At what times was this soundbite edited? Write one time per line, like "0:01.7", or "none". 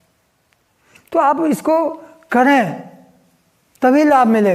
none